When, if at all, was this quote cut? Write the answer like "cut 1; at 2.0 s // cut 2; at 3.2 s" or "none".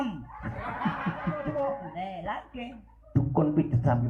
cut 1; at 1.4 s